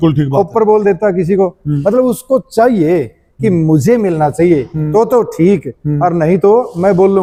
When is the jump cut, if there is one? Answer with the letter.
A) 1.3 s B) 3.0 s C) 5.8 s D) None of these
D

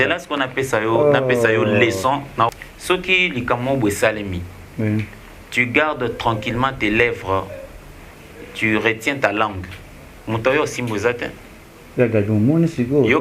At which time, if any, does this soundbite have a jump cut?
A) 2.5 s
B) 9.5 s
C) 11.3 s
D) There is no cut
A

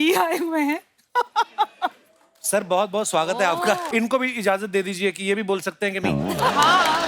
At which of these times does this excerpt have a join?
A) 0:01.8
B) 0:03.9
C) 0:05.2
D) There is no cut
B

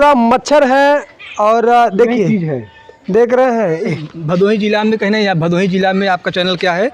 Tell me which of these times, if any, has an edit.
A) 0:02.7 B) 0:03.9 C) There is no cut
B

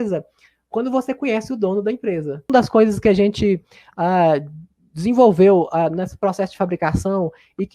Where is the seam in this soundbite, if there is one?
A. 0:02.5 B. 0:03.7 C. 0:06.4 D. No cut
A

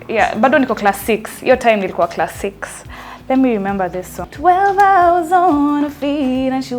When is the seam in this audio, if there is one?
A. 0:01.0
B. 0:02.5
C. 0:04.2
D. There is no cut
C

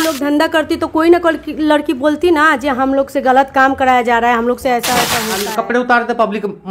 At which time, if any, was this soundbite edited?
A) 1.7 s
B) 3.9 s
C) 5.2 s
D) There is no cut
C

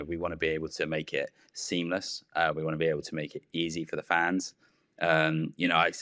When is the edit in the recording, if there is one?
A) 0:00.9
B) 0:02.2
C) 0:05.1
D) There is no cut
D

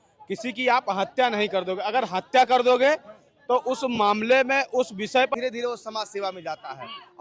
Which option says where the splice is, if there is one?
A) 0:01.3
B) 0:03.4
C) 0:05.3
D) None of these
C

